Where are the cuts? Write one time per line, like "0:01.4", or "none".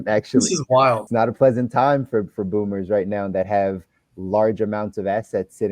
0:01.0